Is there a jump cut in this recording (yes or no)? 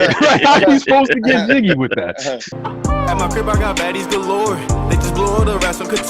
yes